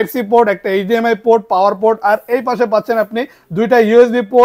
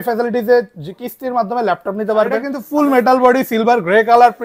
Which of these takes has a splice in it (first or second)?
second